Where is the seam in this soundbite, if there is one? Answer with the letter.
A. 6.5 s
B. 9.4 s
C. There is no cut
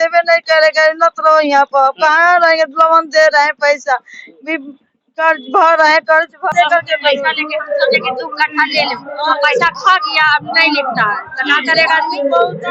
A